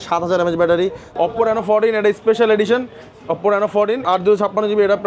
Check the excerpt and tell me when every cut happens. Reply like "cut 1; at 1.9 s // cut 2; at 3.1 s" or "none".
cut 1; at 1.0 s // cut 2; at 4.0 s